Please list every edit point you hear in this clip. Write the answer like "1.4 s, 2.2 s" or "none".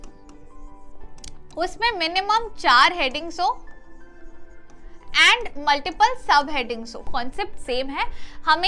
7.1 s